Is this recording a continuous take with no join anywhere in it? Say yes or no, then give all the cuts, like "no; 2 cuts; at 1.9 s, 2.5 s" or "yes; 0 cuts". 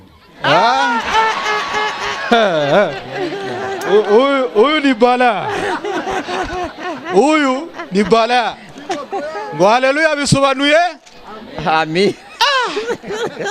yes; 0 cuts